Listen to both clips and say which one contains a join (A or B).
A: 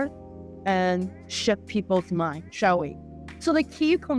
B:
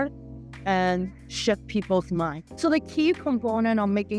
B